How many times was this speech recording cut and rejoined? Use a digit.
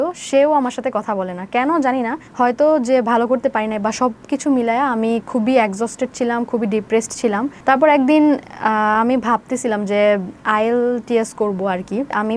0